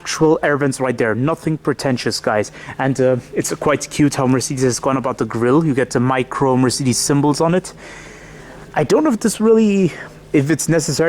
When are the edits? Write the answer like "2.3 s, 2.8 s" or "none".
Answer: none